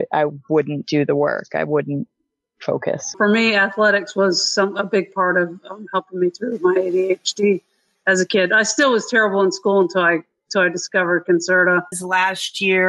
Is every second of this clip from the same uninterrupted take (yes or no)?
no